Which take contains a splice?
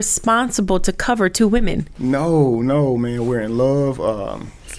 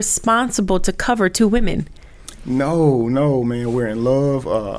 first; 1 cut; at 1.9 s

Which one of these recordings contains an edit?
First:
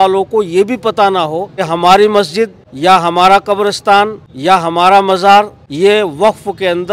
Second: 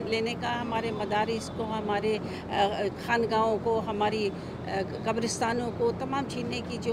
first; 4 cuts; at 1.6 s, 2.6 s, 4.3 s, 5.6 s

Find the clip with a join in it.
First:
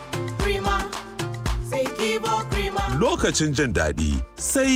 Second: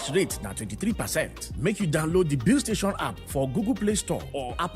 second; 1 cut; at 1.4 s

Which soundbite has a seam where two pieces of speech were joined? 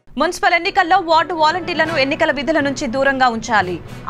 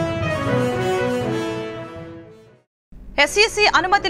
second; 1 cut; at 1.4 s

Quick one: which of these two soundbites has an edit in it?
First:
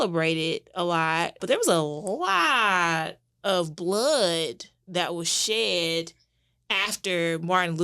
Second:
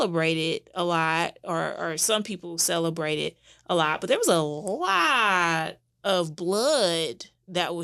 first; 1 cut; at 1.4 s

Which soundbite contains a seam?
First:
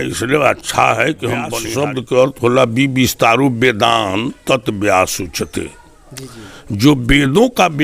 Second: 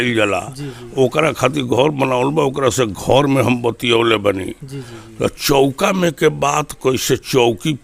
first; 1 cut; at 1.6 s

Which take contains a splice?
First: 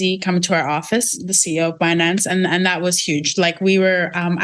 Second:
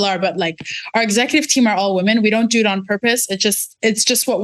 first; 1 cut; at 1.3 s

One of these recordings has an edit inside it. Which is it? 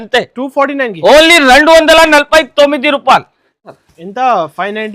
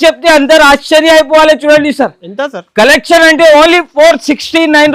first; 1 cut; at 3.7 s

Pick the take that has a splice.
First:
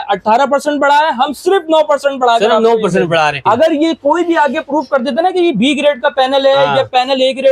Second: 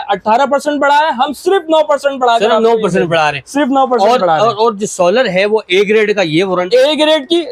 first; 1 cut; at 3.4 s

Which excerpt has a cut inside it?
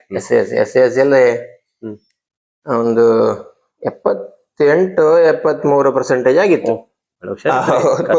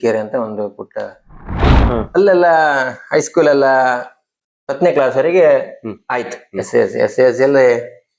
second; 1 cut; at 1.8 s

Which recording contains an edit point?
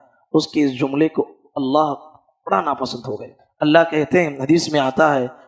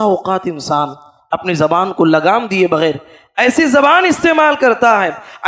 first; 1 cut; at 3.4 s

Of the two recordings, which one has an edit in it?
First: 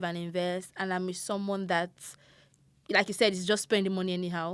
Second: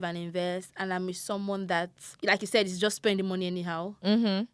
second; 1 cut; at 2.0 s

